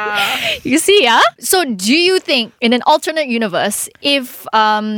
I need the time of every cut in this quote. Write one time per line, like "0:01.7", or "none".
none

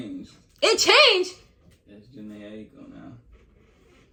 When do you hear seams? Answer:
none

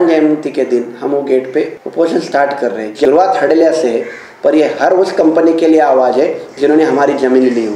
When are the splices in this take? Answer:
0:01.8
0:03.1

